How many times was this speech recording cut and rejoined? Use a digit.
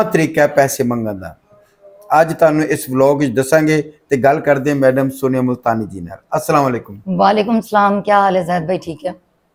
0